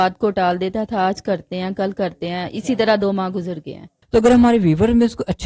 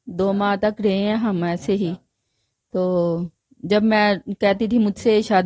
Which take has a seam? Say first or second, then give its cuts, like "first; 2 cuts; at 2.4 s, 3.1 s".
first; 1 cut; at 3.9 s